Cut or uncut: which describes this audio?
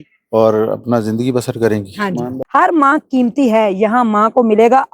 cut